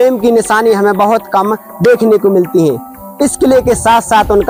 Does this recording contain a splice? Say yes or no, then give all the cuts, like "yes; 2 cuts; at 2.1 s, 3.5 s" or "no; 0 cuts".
no; 0 cuts